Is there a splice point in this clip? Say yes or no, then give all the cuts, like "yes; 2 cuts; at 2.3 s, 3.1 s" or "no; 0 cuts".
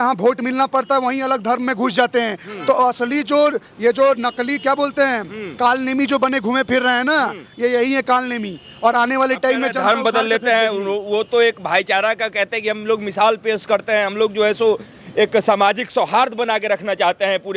no; 0 cuts